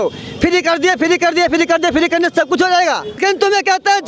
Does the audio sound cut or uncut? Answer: cut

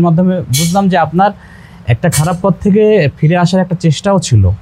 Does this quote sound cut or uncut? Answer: uncut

